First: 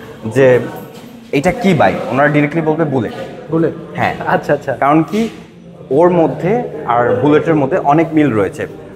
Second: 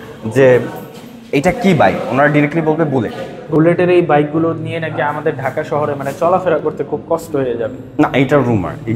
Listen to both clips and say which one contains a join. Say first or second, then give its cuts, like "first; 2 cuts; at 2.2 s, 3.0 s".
second; 1 cut; at 3.5 s